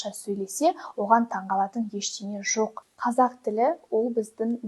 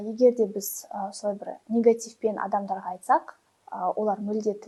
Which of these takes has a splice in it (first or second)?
first